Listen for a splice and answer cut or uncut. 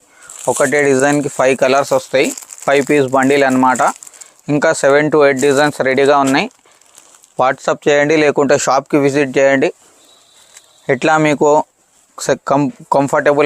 uncut